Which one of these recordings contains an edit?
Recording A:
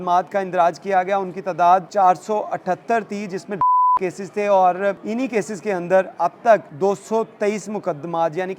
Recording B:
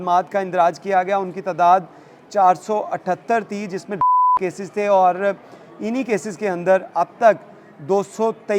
A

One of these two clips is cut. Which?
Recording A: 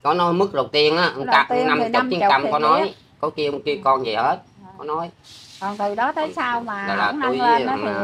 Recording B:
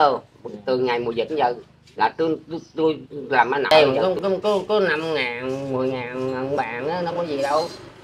B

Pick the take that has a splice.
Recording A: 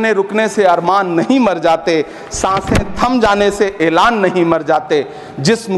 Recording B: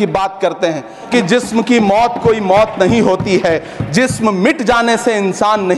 B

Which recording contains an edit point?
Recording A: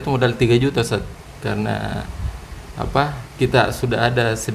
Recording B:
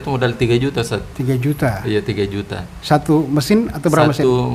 A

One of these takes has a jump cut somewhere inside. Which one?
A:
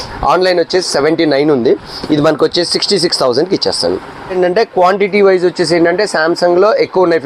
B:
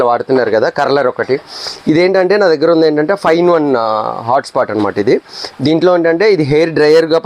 A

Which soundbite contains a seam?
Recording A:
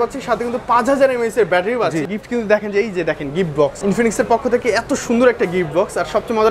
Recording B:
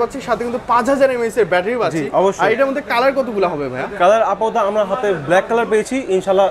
A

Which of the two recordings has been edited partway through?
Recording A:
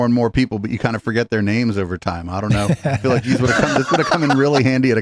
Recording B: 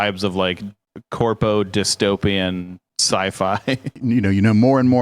B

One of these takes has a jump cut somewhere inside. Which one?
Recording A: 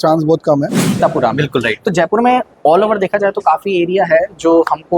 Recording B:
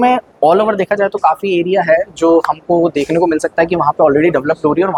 A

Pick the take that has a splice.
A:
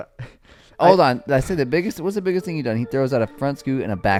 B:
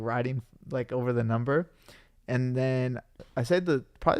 B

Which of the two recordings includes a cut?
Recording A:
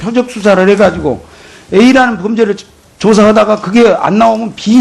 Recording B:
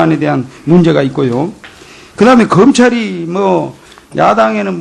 B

